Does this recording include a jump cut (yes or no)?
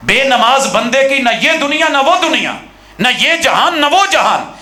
no